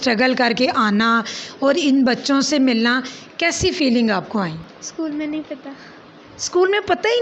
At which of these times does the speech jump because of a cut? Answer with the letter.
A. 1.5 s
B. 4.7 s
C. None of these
B